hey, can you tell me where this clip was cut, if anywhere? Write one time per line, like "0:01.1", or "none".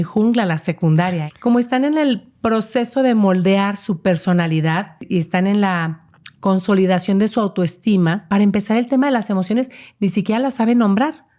0:01.2
0:05.0
0:08.2